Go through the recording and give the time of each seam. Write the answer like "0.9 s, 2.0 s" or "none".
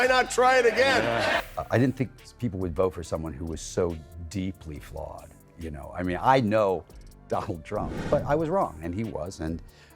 1.5 s, 7.9 s